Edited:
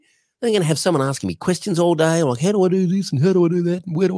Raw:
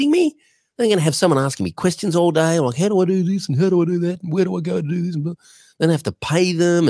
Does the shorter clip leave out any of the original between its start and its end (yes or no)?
no